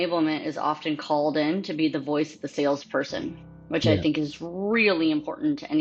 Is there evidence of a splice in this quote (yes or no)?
no